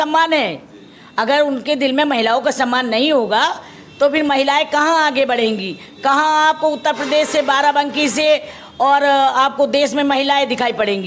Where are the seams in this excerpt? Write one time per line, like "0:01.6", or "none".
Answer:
none